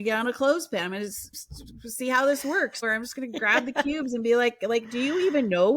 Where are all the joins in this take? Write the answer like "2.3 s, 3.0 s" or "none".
2.8 s